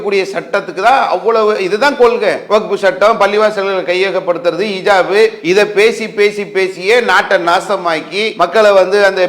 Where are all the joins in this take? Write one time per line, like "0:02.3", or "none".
0:02.4
0:05.4
0:08.3